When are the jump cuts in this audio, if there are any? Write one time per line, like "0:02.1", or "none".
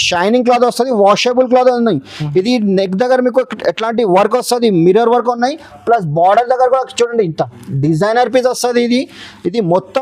none